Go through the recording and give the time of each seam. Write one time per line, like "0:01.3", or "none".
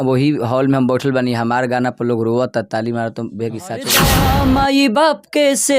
0:04.2

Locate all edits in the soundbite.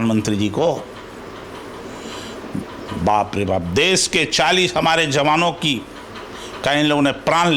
none

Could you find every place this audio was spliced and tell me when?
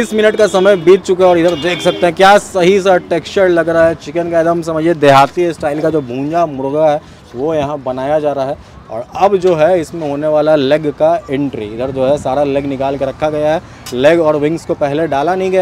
none

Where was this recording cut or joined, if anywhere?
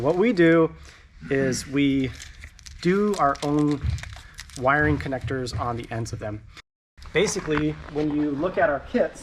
0:06.8

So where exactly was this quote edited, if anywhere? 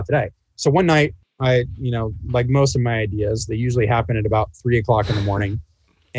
0:01.2

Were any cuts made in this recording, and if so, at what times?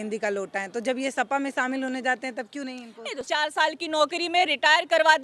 0:03.1

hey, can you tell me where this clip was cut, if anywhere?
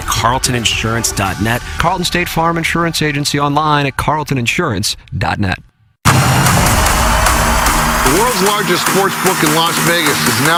none

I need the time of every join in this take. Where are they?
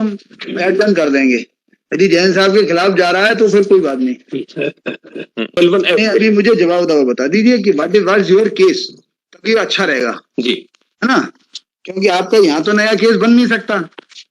0:05.6

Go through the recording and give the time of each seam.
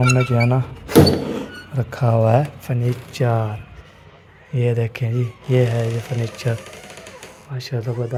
none

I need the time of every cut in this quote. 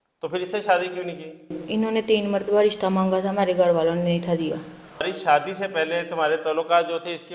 0:05.1

